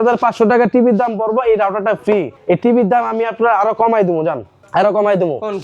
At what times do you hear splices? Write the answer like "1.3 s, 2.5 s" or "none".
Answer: 2.3 s, 4.6 s